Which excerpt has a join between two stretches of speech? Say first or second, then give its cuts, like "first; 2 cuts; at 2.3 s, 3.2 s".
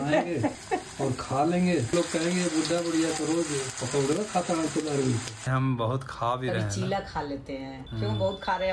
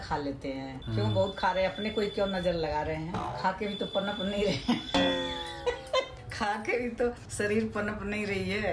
first; 2 cuts; at 1.9 s, 5.4 s